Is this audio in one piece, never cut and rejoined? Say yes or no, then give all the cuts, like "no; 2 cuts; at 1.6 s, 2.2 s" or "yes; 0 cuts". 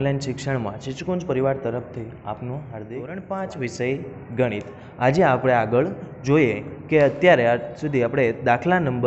no; 1 cut; at 3.1 s